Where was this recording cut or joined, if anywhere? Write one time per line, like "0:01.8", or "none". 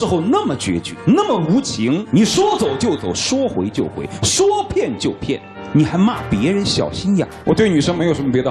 0:00.9
0:02.0
0:07.4